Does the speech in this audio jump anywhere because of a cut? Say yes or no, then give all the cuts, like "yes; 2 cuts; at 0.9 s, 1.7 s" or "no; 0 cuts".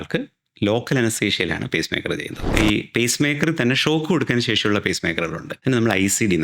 yes; 2 cuts; at 2.5 s, 5.5 s